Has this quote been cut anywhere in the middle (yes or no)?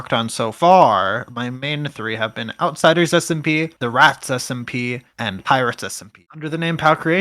yes